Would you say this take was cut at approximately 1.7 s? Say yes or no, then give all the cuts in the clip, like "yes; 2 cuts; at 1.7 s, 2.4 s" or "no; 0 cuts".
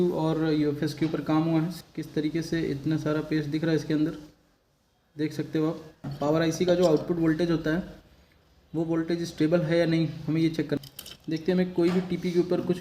yes; 3 cuts; at 1.7 s, 6.0 s, 10.8 s